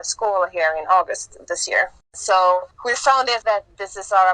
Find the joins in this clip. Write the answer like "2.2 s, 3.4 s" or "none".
2.1 s, 3.0 s